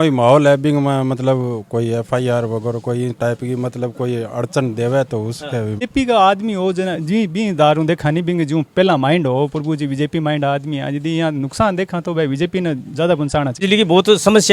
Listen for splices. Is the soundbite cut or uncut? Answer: cut